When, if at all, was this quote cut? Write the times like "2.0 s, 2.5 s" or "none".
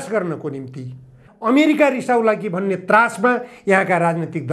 1.3 s